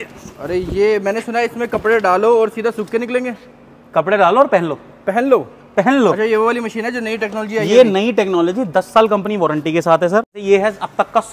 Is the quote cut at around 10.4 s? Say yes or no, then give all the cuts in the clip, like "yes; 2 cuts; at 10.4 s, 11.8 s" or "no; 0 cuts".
yes; 1 cut; at 10.4 s